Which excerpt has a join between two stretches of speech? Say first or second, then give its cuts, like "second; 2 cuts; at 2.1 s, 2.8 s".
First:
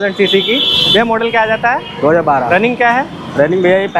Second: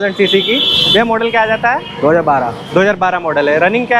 first; 1 cut; at 2.5 s